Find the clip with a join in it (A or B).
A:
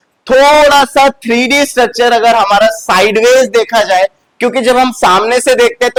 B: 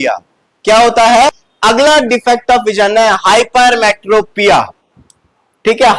B